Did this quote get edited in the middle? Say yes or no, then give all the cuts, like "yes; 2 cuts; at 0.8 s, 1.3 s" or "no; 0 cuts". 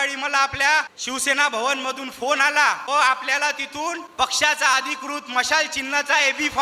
yes; 3 cuts; at 1.0 s, 2.8 s, 4.0 s